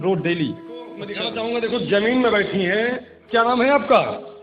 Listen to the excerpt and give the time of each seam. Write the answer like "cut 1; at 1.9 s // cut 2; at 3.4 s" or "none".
cut 1; at 1.1 s